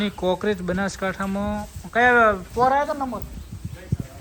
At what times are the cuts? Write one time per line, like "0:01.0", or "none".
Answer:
none